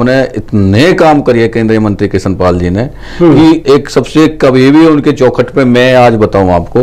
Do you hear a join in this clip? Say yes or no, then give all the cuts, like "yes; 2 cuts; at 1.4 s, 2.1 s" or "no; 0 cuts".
no; 0 cuts